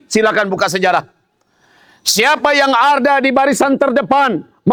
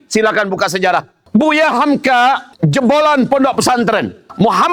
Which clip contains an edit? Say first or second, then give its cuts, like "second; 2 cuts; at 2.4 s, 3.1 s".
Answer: second; 1 cut; at 1.2 s